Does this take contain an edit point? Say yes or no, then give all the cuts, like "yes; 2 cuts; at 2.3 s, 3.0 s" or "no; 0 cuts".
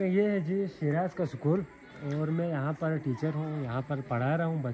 no; 0 cuts